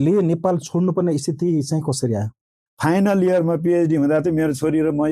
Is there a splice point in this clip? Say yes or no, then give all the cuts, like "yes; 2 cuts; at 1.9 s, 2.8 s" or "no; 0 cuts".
yes; 1 cut; at 2.6 s